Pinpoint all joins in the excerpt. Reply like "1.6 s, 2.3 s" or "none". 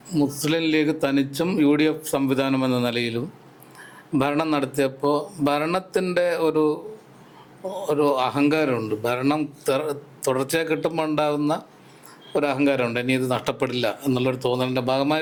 none